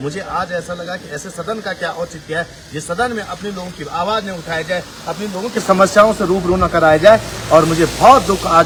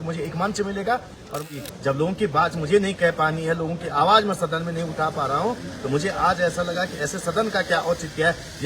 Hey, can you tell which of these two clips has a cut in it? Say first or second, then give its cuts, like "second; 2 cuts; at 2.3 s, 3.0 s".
second; 1 cut; at 1.5 s